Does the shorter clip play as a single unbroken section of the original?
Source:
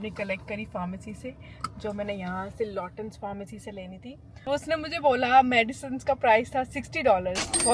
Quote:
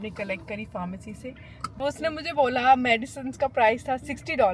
no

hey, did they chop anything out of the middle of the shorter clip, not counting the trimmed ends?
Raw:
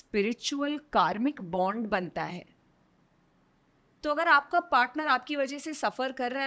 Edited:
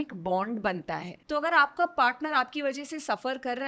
yes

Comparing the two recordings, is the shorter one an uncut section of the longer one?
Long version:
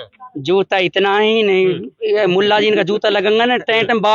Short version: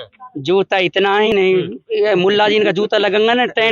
no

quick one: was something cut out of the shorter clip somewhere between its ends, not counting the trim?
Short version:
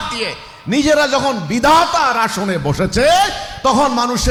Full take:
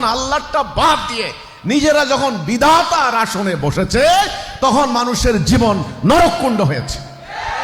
no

